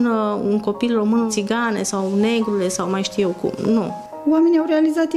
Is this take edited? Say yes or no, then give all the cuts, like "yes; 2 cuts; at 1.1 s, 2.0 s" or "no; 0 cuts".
yes; 2 cuts; at 1.3 s, 4.0 s